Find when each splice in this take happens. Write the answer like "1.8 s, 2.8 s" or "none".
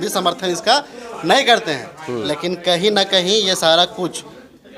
none